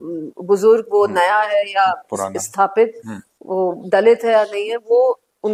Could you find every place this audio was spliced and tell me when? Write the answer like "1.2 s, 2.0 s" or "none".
none